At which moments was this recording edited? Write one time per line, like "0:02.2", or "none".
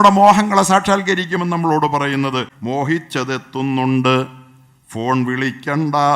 0:02.5